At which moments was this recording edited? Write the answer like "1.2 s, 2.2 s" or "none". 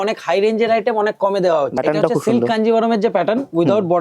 1.8 s

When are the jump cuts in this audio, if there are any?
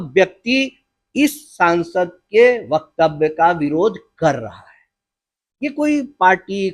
none

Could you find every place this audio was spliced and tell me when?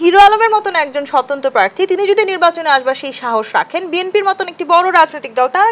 none

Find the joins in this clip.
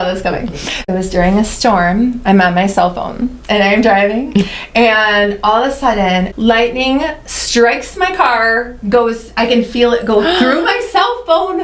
0.8 s, 6.3 s

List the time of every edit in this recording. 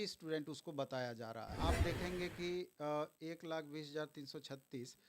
1.5 s

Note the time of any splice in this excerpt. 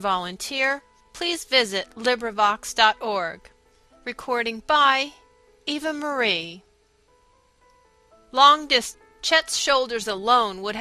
none

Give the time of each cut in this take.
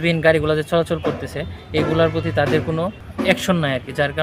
3.0 s

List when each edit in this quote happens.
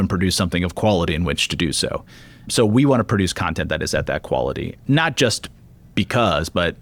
none

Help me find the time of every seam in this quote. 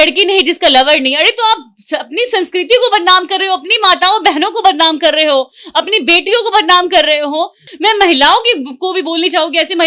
7.6 s

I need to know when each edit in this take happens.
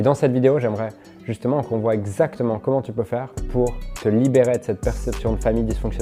none

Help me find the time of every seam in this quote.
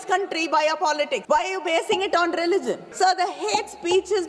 1.2 s, 2.9 s

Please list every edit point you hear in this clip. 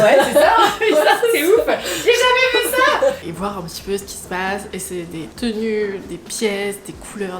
3.2 s

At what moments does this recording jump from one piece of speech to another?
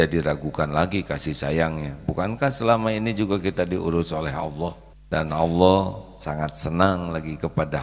4.9 s

